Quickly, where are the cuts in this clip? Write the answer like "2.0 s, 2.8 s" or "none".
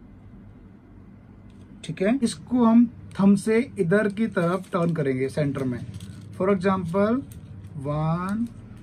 2.2 s

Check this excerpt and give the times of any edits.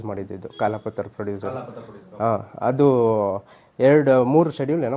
none

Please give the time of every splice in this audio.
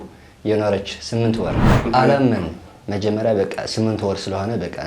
1.7 s

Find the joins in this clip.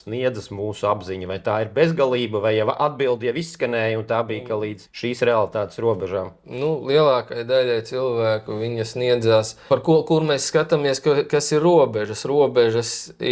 none

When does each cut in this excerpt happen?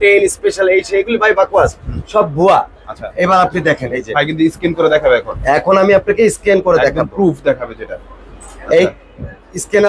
none

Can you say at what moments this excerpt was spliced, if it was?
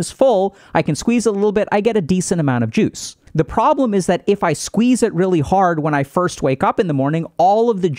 none

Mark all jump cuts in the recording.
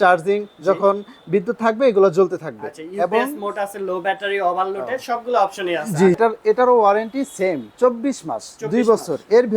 6.2 s

